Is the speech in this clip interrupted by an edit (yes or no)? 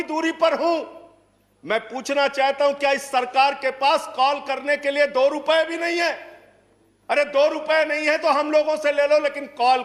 no